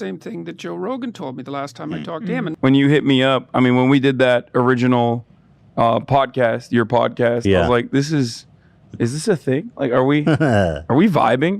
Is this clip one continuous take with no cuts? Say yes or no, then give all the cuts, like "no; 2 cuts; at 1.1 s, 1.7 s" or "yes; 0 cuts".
no; 1 cut; at 2.5 s